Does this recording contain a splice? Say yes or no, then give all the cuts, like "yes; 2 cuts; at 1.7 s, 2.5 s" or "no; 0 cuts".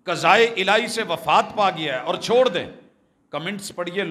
no; 0 cuts